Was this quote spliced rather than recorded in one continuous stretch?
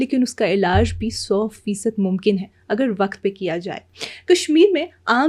no; 0 cuts

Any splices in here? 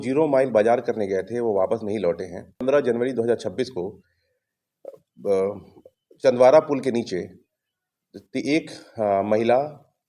yes; 1 cut; at 2.6 s

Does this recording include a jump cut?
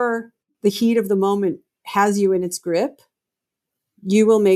no; 0 cuts

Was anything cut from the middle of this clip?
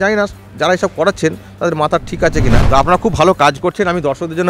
yes; 1 cut; at 2.6 s

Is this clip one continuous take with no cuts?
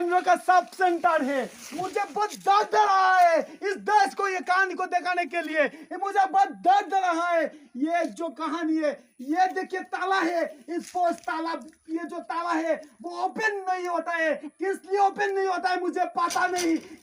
yes; 0 cuts

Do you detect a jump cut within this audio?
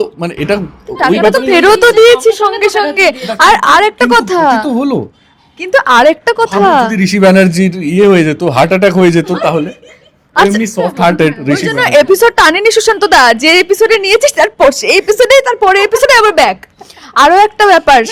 no; 0 cuts

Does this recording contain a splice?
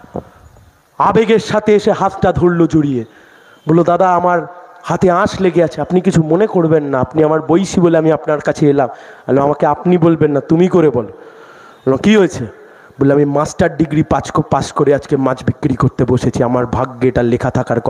no; 0 cuts

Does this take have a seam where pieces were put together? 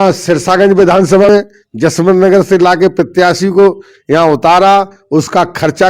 yes; 1 cut; at 1.3 s

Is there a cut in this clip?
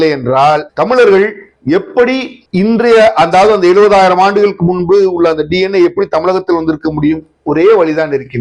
no; 0 cuts

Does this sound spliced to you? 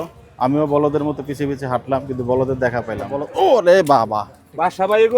yes; 1 cut; at 3.2 s

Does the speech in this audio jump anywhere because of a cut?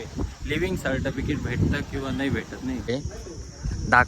yes; 1 cut; at 3.0 s

